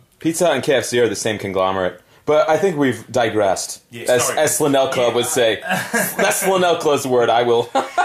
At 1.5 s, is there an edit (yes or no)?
yes